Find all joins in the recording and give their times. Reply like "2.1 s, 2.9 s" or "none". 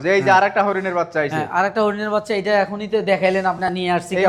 none